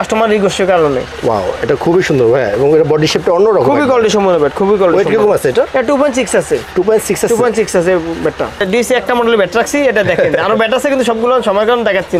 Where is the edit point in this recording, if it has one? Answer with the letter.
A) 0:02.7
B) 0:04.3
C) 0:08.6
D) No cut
C